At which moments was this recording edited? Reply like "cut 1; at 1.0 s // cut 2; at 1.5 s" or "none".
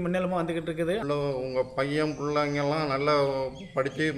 cut 1; at 1.0 s